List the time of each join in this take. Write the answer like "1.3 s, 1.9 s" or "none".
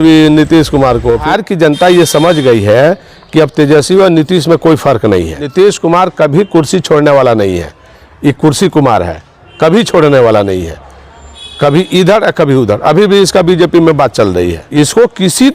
1.2 s, 5.5 s, 14.6 s